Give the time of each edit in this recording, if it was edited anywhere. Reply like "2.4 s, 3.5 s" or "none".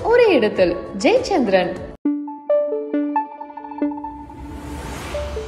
none